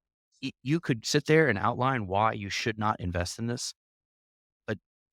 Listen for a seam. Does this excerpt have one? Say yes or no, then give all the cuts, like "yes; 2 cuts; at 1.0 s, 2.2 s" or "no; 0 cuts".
no; 0 cuts